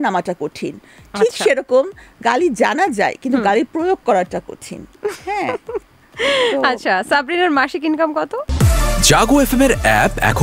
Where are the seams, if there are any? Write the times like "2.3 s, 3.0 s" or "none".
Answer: 8.5 s